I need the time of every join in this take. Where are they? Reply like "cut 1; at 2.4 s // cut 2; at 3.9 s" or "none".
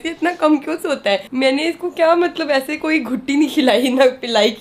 none